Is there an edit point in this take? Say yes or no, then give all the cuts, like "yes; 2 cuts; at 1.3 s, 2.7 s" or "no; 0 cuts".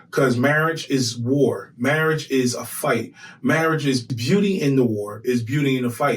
yes; 1 cut; at 4.1 s